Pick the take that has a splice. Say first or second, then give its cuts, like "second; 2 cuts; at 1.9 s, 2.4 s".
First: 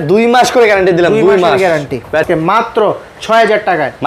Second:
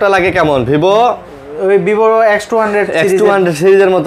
first; 1 cut; at 2.2 s